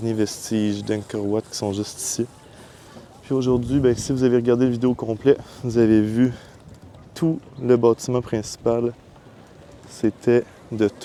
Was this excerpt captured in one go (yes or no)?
yes